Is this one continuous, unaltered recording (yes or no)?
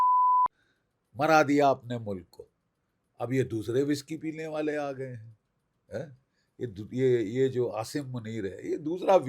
yes